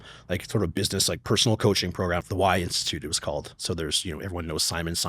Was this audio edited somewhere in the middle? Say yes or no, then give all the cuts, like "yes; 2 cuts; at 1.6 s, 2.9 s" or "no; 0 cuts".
yes; 1 cut; at 2.3 s